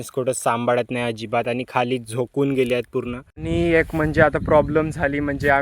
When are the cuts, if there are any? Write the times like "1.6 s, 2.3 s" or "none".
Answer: 3.3 s